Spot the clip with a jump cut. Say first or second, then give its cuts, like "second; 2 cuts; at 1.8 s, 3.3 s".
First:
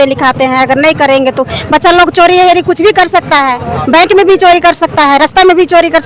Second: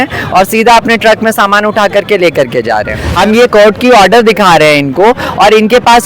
second; 1 cut; at 3.0 s